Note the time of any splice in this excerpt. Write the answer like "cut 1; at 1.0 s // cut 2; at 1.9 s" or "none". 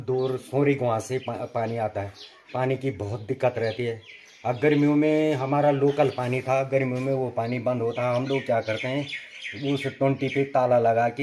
none